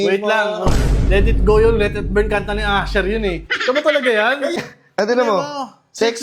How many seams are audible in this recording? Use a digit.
1